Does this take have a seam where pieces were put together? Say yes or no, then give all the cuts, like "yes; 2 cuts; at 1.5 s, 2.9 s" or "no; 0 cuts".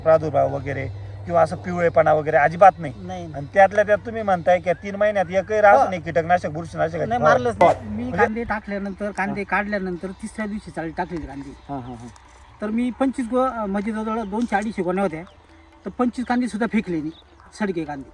yes; 1 cut; at 7.6 s